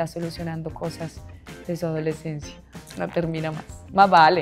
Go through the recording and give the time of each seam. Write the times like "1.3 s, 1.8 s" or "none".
2.8 s